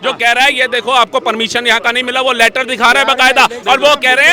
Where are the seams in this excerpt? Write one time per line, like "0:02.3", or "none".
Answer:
none